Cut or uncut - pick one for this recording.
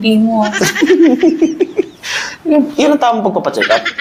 uncut